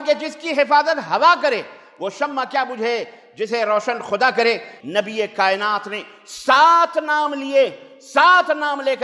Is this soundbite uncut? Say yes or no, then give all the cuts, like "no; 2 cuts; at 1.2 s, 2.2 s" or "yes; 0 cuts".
no; 1 cut; at 4.7 s